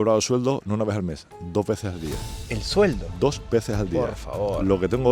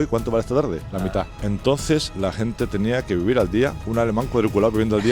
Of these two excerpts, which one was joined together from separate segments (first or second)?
second